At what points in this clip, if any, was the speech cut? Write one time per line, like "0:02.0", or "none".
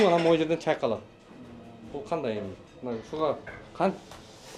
none